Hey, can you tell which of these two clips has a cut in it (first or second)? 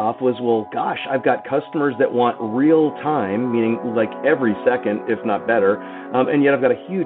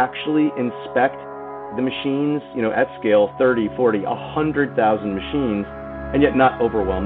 second